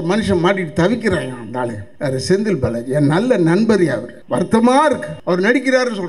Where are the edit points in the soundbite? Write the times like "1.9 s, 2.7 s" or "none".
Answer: 1.8 s, 4.1 s, 5.1 s